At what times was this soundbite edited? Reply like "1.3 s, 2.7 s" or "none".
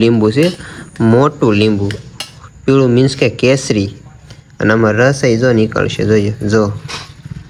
none